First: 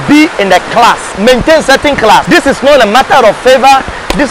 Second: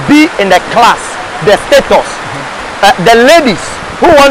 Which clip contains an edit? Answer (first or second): first